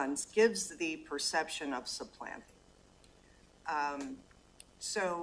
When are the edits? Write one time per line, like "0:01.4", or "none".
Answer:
none